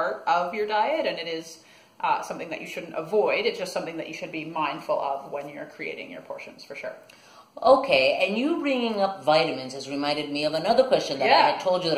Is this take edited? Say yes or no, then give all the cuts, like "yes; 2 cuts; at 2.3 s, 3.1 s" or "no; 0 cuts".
no; 0 cuts